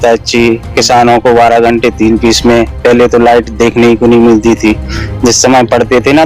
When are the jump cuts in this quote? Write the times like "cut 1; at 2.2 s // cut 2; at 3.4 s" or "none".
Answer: none